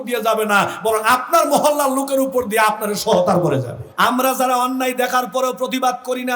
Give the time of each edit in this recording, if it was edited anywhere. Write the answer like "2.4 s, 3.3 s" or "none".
3.8 s